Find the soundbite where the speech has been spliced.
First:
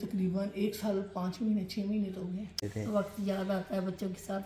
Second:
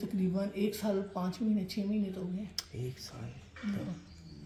first; 1 cut; at 2.6 s

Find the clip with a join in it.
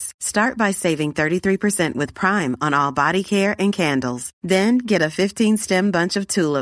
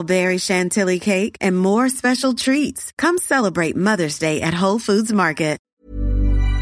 second; 1 cut; at 5.7 s

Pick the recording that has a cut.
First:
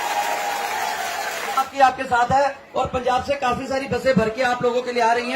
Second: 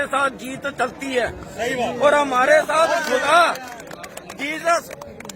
first; 1 cut; at 1.7 s

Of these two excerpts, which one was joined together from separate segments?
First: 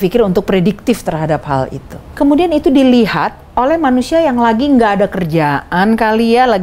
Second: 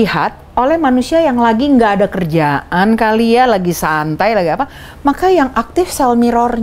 first; 1 cut; at 2.0 s

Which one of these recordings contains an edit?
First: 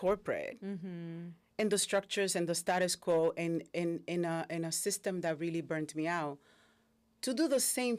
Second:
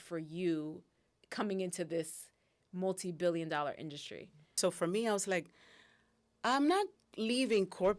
second; 2 cuts; at 1.2 s, 4.5 s

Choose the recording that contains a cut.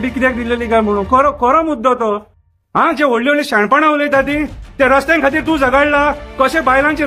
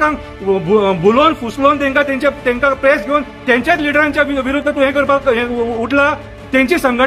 first; 1 cut; at 2.4 s

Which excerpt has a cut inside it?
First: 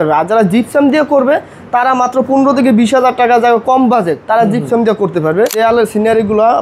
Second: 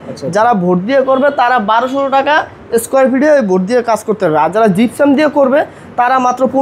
first; 1 cut; at 5.5 s

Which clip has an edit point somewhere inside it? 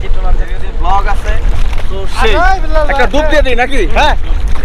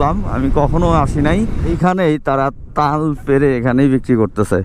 second; 1 cut; at 1.7 s

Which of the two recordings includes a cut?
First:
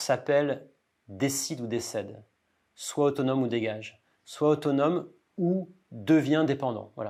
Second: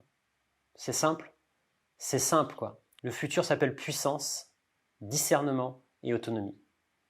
second; 1 cut; at 2.9 s

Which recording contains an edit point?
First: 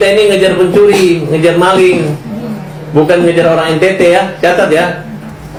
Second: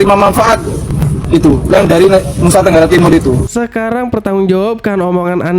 second; 1 cut; at 3.5 s

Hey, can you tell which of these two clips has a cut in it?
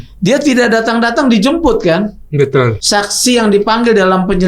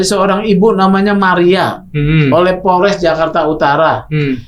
first; 1 cut; at 2.8 s

